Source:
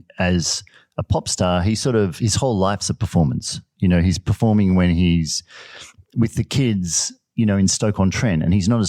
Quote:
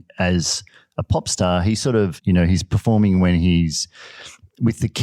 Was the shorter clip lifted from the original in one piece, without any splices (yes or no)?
no